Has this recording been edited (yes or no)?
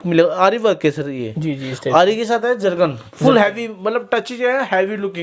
no